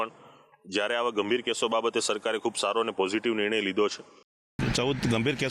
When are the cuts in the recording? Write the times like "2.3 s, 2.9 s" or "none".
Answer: 4.3 s